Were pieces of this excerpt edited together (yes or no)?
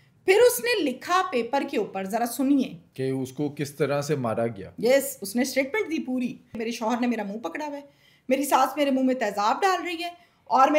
yes